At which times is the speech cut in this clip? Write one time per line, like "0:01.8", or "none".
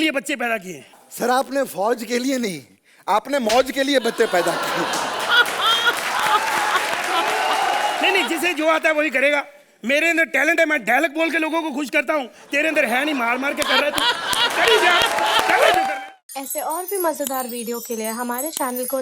0:15.9